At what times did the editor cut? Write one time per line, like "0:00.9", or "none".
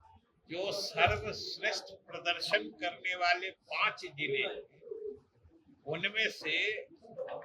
none